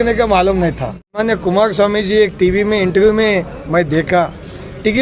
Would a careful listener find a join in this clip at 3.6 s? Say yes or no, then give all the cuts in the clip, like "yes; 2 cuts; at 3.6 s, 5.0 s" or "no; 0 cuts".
no; 1 cut; at 1.2 s